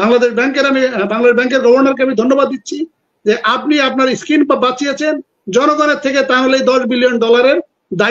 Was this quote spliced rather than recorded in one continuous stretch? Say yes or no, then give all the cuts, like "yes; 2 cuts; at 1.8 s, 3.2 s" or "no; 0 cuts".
no; 0 cuts